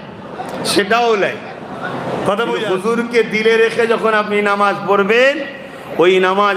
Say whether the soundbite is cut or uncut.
cut